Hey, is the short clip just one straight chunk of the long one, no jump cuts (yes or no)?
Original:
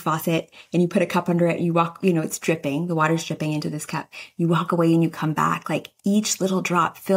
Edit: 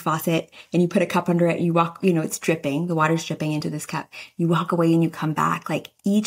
yes